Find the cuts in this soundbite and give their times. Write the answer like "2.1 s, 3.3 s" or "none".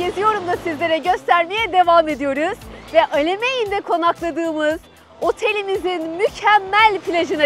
none

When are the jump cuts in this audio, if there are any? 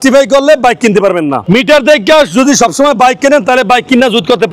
none

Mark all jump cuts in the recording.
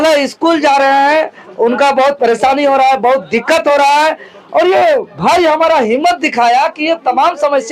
none

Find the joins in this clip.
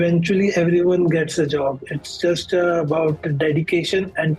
none

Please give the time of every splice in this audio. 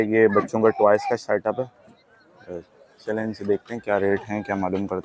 none

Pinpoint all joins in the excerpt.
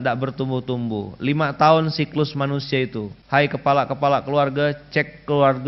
3.1 s

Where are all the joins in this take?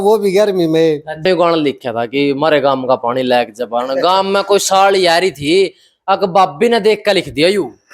1.2 s

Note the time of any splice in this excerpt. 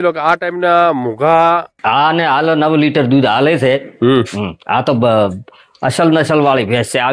1.7 s

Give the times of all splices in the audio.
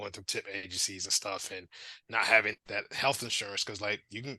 2.6 s

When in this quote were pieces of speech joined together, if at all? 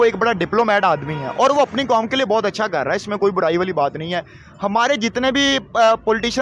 none

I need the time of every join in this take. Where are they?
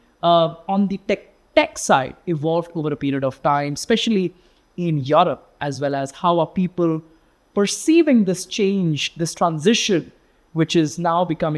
none

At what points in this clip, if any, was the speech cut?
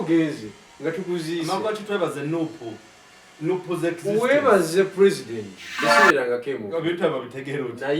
5.8 s

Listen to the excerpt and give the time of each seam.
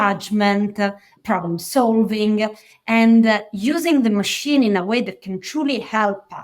1.1 s

